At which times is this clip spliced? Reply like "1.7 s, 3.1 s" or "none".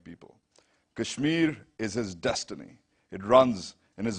none